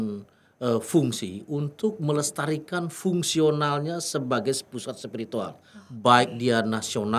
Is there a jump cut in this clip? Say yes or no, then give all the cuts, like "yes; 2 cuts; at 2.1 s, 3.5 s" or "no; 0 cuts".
no; 0 cuts